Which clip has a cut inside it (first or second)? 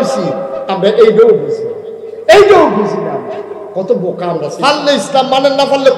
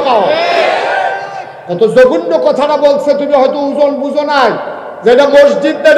first